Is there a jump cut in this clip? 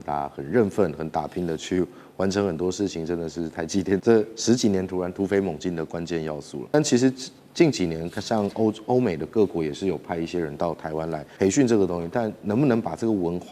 yes; 3 cuts; at 4.0 s, 6.7 s, 11.3 s

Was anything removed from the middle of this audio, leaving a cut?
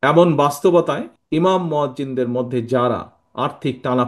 yes; 1 cut; at 1.1 s

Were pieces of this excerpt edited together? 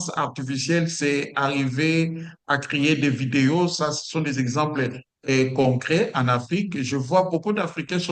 no; 0 cuts

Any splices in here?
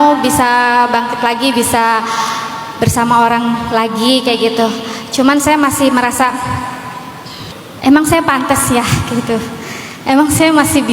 yes; 1 cut; at 7.5 s

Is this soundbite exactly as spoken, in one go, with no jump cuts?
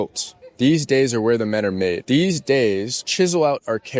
no; 2 cuts; at 2.0 s, 3.0 s

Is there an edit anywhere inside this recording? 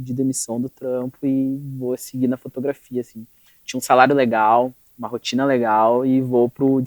no; 0 cuts

